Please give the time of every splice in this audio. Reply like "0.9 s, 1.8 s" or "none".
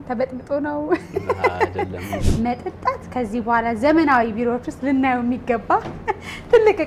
2.2 s